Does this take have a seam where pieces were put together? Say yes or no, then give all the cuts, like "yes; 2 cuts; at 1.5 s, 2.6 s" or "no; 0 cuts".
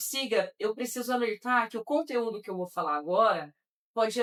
no; 0 cuts